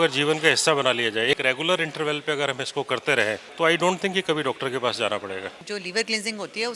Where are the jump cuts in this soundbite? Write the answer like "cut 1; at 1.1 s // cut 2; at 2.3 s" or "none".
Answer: cut 1; at 1.4 s // cut 2; at 3.5 s // cut 3; at 5.6 s